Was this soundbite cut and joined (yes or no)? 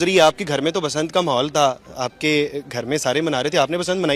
no